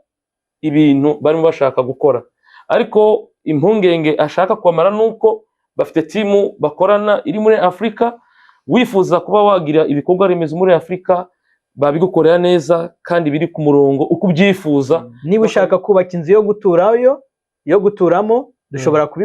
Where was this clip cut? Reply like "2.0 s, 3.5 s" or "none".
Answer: 15.1 s